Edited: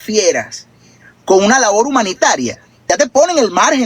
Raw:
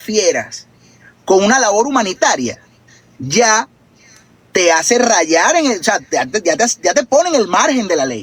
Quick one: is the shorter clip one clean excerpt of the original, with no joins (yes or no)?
no